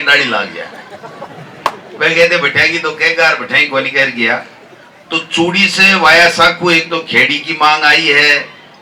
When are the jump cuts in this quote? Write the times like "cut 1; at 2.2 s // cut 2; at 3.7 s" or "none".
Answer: none